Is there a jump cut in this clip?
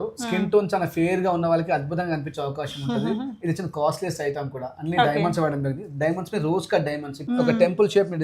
yes; 1 cut; at 7.1 s

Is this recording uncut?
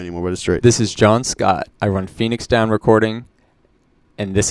no; 1 cut; at 1.7 s

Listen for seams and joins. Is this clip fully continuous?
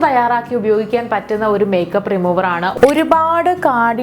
no; 1 cut; at 2.7 s

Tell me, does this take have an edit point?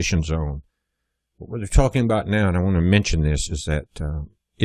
no; 0 cuts

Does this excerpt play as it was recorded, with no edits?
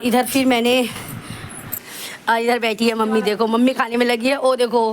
no; 1 cut; at 1.8 s

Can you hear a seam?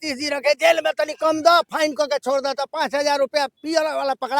no; 0 cuts

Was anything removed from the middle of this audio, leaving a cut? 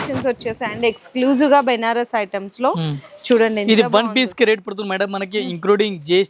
no; 0 cuts

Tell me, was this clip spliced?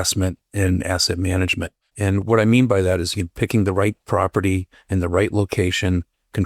yes; 1 cut; at 1.8 s

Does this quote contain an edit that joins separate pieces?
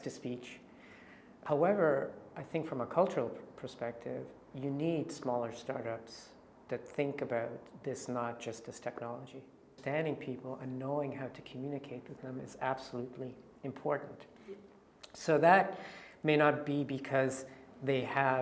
yes; 2 cuts; at 1.2 s, 9.8 s

